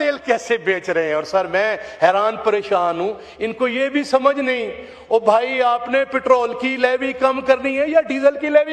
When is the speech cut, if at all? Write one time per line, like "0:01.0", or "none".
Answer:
none